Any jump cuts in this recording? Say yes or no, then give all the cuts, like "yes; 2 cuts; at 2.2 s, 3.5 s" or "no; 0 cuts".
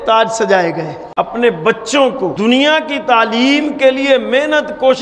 yes; 2 cuts; at 1.0 s, 2.3 s